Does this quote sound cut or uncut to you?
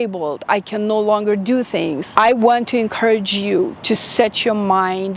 uncut